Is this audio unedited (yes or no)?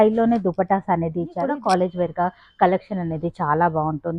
no